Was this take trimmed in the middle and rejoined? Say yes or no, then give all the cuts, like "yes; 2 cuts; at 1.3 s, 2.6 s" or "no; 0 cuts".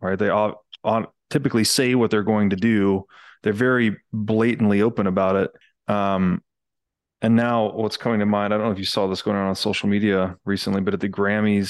yes; 1 cut; at 5.7 s